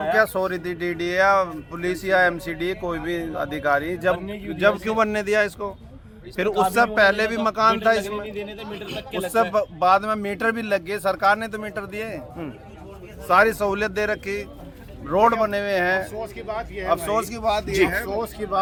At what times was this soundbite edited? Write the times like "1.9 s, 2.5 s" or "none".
none

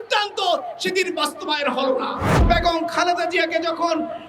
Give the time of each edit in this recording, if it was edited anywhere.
2.4 s

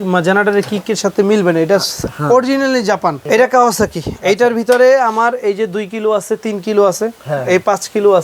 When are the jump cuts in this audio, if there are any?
3.2 s

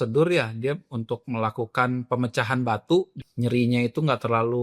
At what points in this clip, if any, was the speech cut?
3.2 s

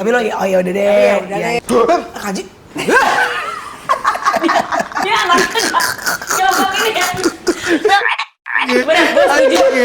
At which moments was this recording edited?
1.6 s

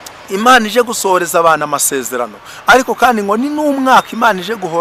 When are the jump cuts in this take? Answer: none

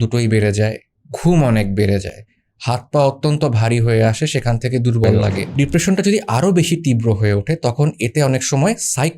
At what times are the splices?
5.4 s

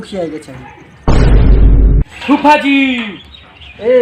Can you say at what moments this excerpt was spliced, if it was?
2.1 s

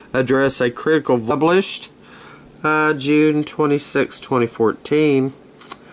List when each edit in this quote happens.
none

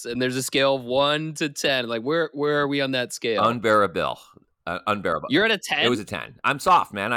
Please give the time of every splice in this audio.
none

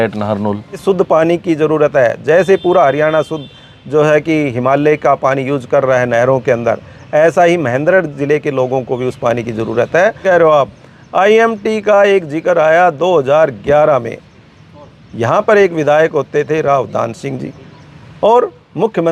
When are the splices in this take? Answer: 0.8 s, 10.2 s

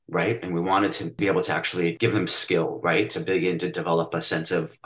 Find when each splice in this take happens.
1.1 s, 2.0 s

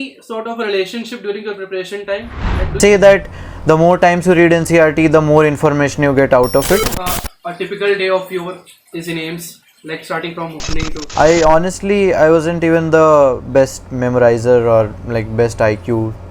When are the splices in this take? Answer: 2.5 s, 6.8 s, 11.0 s

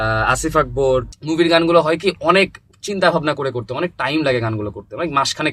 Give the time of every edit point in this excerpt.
1.1 s

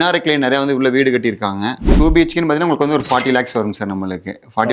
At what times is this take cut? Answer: 1.9 s

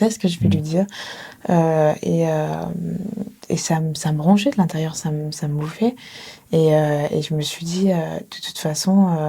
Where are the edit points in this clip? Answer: none

